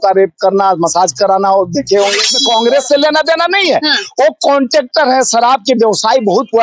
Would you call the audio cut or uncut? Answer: cut